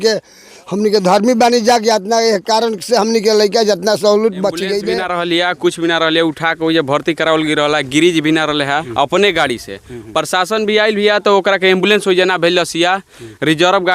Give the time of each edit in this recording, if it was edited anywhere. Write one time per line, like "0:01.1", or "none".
0:04.9
0:08.9